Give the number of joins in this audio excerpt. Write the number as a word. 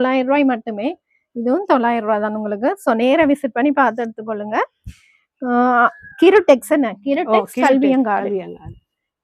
zero